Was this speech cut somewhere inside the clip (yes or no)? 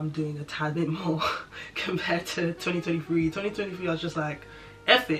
no